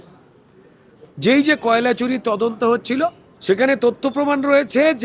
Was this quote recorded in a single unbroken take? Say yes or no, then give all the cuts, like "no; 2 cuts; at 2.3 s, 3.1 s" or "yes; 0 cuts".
no; 1 cut; at 3.3 s